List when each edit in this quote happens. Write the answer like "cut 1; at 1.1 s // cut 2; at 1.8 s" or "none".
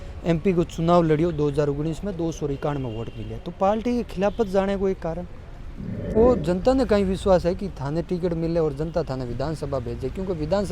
cut 1; at 6.2 s